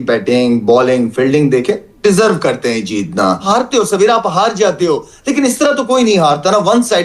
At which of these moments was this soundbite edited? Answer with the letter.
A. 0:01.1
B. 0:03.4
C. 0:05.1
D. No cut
B